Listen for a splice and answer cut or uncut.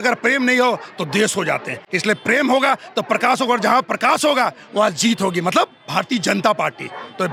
uncut